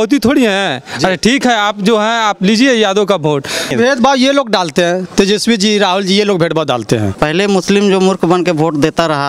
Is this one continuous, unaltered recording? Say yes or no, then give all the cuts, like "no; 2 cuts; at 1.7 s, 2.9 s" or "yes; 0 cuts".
no; 2 cuts; at 3.7 s, 7.1 s